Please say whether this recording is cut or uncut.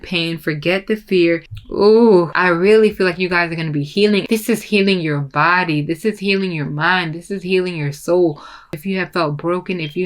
cut